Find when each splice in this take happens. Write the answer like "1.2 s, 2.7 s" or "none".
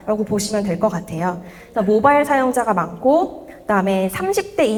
none